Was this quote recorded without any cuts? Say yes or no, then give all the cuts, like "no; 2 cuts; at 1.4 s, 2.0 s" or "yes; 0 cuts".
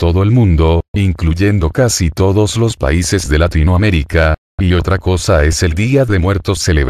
yes; 0 cuts